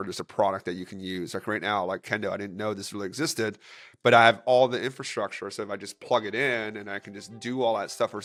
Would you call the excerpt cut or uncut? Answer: uncut